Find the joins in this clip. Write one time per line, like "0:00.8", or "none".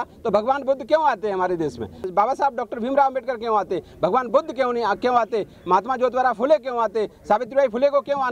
0:02.0